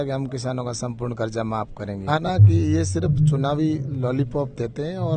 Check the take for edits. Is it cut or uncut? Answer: cut